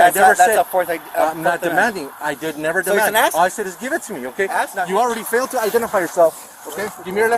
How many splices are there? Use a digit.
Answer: 1